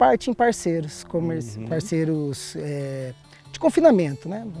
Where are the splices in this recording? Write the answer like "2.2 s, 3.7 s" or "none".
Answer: none